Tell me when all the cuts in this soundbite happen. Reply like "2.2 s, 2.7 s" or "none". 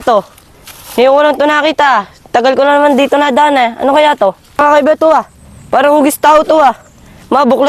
4.4 s